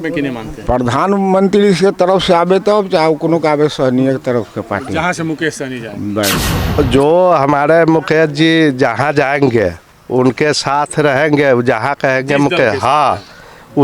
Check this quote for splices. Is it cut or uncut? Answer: cut